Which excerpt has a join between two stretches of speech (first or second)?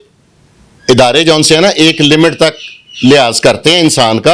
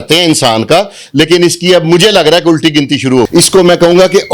second